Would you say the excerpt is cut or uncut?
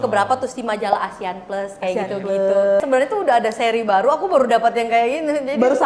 cut